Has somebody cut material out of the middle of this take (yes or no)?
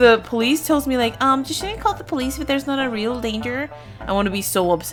no